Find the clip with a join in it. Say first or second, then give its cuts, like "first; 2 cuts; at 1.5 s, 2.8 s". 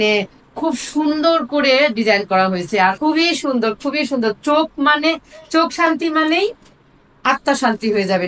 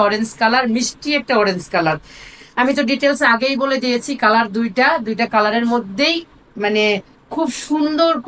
first; 1 cut; at 3.0 s